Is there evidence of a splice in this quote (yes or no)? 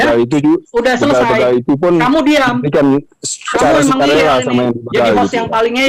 no